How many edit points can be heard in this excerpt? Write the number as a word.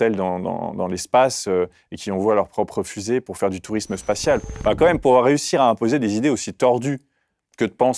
one